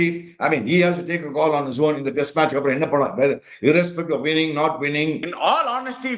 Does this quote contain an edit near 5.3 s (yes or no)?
yes